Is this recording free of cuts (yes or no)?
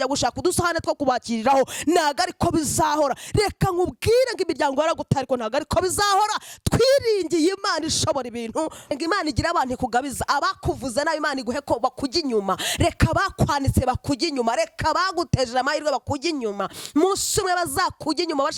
no